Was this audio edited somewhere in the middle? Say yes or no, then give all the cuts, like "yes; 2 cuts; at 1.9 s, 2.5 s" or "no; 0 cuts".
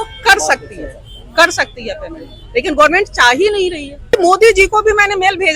yes; 1 cut; at 4.1 s